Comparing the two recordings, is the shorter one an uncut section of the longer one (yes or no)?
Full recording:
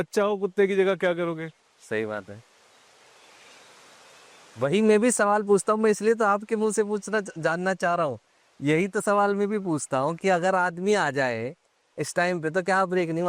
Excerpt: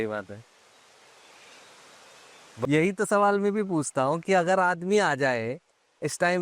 no